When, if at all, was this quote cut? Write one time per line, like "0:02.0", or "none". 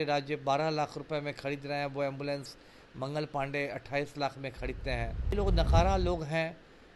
0:05.3